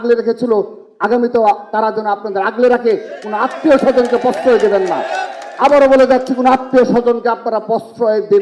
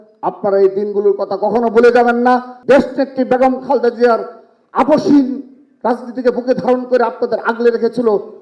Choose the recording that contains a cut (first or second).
second